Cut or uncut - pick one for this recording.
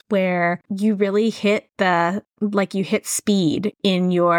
cut